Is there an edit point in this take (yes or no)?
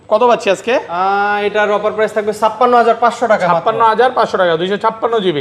no